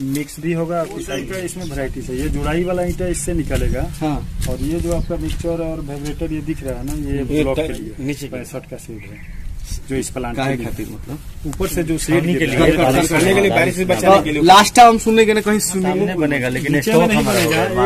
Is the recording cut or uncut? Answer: cut